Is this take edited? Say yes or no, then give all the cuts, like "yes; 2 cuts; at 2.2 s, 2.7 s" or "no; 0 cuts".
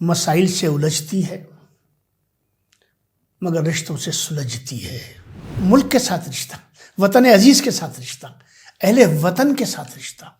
yes; 1 cut; at 5.5 s